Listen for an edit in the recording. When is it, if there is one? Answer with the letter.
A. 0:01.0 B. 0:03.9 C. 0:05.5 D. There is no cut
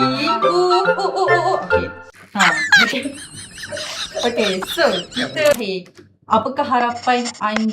C